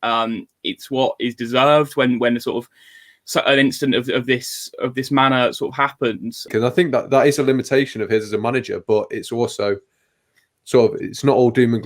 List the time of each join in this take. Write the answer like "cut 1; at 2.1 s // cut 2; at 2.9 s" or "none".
cut 1; at 6.5 s